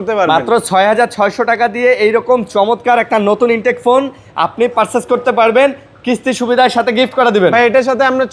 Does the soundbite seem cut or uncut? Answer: uncut